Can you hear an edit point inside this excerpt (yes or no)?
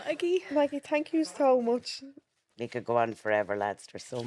no